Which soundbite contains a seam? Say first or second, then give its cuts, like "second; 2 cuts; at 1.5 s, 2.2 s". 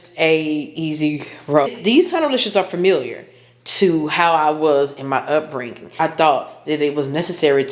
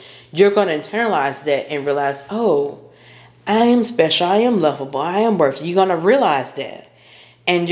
first; 2 cuts; at 1.7 s, 5.9 s